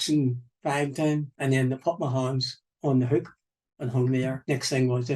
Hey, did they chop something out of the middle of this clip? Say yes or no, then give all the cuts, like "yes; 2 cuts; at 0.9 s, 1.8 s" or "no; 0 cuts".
yes; 2 cuts; at 1.3 s, 4.4 s